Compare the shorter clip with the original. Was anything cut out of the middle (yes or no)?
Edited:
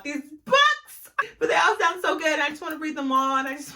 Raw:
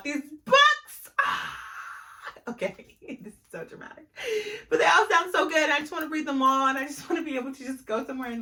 yes